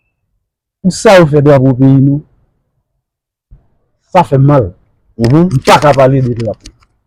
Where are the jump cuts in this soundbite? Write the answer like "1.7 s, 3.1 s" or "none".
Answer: none